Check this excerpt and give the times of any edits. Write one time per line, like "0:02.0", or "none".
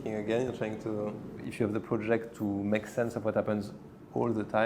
0:01.5

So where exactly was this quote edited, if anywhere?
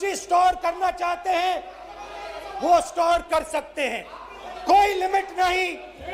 none

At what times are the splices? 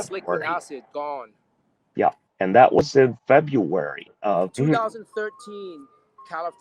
0:04.5

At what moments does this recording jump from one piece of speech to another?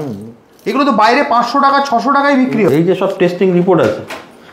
0:02.7

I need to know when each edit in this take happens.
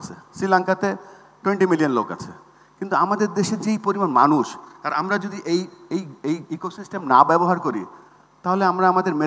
none

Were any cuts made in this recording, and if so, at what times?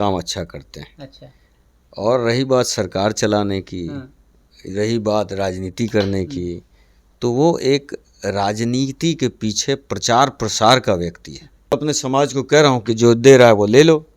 0:11.7

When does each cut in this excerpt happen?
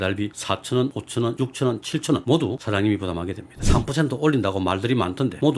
0:01.3
0:03.5

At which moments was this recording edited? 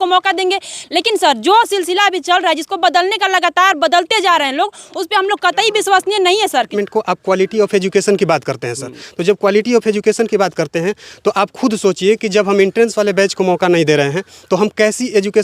0:06.7

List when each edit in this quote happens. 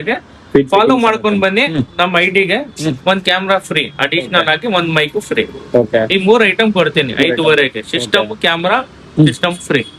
none

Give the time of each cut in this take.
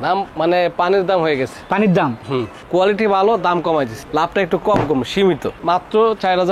0:02.6
0:05.6

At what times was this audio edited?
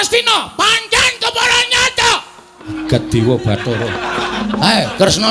0:02.7
0:04.4

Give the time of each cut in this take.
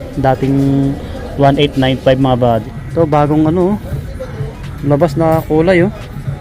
0:02.8

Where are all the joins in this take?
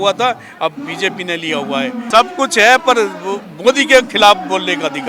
0:02.0

